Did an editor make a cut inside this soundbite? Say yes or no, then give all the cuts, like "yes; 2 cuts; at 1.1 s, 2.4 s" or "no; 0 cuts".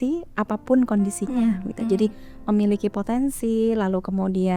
no; 0 cuts